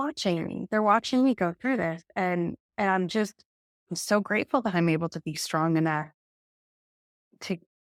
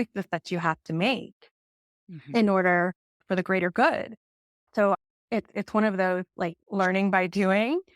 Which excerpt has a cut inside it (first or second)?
second